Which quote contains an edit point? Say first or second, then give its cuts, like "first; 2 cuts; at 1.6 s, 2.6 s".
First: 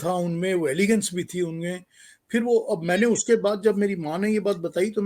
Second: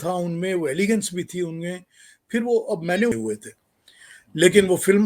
second; 1 cut; at 3.1 s